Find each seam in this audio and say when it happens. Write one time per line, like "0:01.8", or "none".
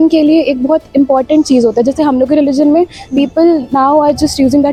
none